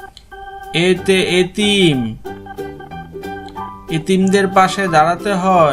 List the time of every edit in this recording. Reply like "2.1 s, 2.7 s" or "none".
0.7 s, 2.4 s, 3.9 s